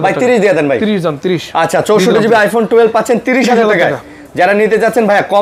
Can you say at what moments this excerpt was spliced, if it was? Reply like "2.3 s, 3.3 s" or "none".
none